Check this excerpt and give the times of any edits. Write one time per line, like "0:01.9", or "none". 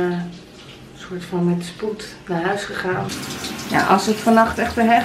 0:03.1